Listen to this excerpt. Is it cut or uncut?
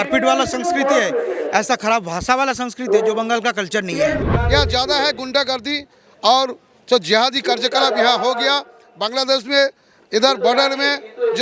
cut